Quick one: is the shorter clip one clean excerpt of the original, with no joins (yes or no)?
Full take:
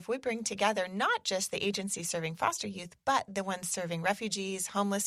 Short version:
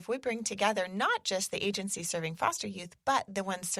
yes